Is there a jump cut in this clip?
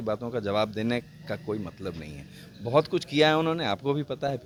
no; 0 cuts

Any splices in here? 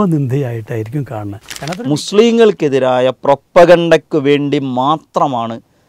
yes; 1 cut; at 1.5 s

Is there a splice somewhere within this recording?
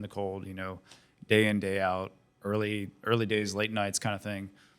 no; 0 cuts

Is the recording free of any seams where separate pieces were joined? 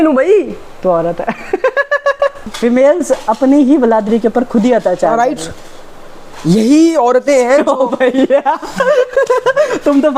no; 1 cut; at 2.5 s

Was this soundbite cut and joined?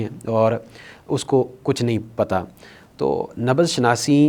no; 0 cuts

